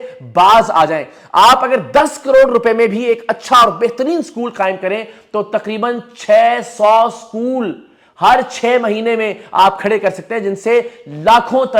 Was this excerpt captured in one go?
yes; 0 cuts

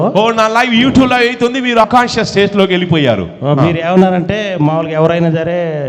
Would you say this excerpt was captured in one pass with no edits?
no; 1 cut; at 1.8 s

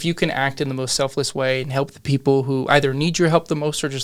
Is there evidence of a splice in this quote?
no; 0 cuts

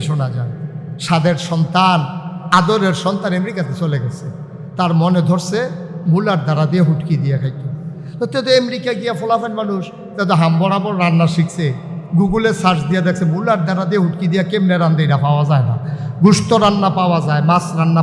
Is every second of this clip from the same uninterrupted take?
yes; 0 cuts

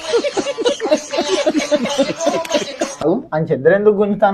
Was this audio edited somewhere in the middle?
yes; 1 cut; at 3.1 s

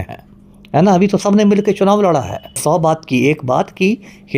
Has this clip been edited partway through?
yes; 1 cut; at 2.6 s

